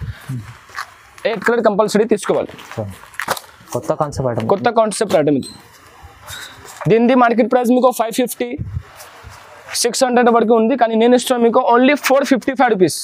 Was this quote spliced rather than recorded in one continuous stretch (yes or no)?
no